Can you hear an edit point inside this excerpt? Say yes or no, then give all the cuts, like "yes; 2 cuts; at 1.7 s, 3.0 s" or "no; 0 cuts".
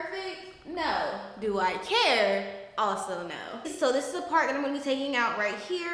no; 0 cuts